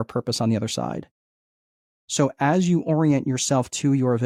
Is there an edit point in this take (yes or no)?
no